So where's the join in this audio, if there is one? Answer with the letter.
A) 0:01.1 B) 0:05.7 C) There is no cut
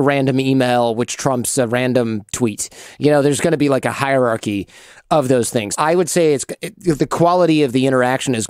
B